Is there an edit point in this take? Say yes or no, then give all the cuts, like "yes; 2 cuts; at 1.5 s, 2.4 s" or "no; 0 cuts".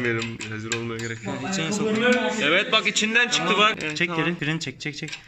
no; 0 cuts